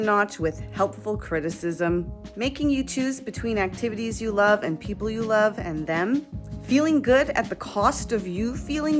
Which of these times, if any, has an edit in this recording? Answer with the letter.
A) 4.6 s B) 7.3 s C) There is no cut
C